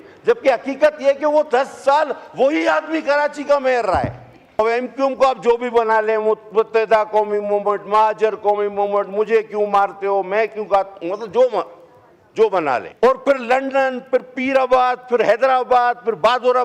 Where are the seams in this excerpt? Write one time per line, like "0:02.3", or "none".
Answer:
0:04.6
0:12.9

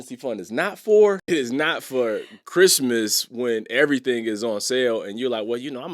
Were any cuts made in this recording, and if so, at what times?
0:01.2

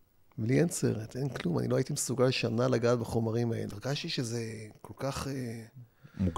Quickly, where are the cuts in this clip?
0:03.7

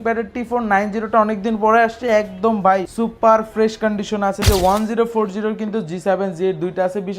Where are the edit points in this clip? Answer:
0:02.9
0:04.4

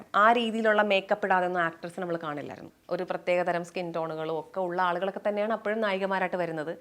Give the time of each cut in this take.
0:02.7

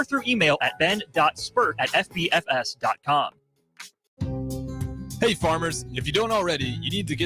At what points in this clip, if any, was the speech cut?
0:03.9

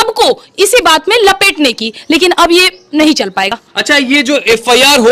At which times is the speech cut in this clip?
none

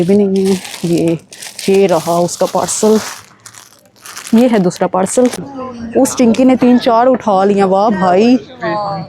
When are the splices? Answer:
0:05.4

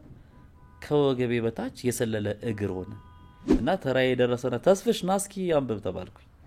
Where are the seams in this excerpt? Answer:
0:03.5

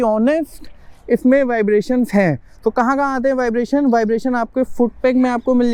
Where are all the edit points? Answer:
none

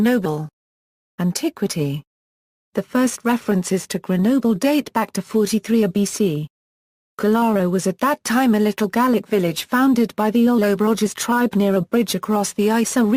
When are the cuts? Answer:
none

